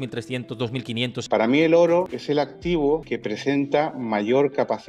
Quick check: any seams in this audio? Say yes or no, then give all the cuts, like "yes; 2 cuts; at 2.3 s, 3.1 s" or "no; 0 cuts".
yes; 3 cuts; at 1.2 s, 2.2 s, 3.0 s